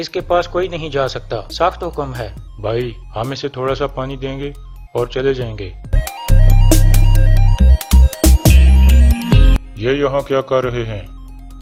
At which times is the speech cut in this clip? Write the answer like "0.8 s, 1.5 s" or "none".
none